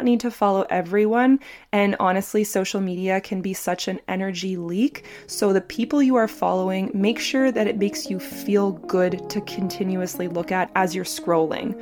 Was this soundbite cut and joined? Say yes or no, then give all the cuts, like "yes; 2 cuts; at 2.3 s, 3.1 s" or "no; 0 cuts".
yes; 1 cut; at 10.7 s